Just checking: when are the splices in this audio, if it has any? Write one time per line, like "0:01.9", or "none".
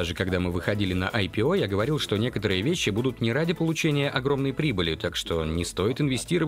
none